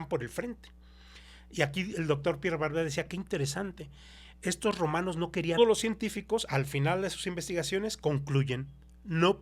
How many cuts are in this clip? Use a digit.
1